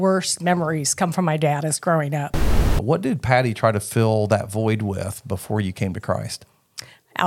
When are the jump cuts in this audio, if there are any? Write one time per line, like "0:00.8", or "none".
0:02.5